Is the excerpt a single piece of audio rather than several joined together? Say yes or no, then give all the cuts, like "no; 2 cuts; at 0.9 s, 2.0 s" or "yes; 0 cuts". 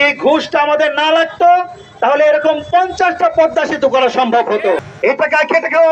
no; 1 cut; at 4.8 s